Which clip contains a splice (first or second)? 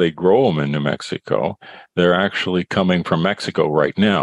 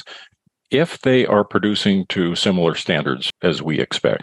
second